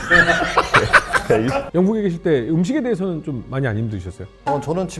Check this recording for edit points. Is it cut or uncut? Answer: cut